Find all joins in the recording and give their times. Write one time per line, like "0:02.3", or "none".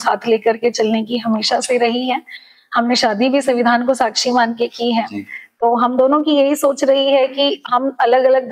none